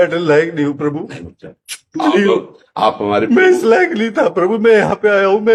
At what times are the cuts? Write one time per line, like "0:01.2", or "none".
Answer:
none